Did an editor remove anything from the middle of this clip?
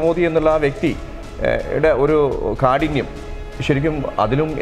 no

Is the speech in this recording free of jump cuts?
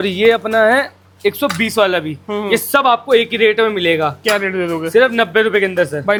yes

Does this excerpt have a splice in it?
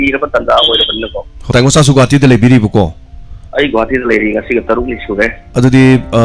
yes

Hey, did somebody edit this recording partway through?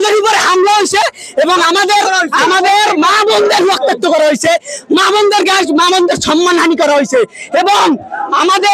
no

